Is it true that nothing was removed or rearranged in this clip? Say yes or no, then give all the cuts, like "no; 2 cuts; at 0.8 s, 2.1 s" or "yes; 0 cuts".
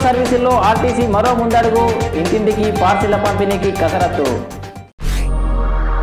yes; 0 cuts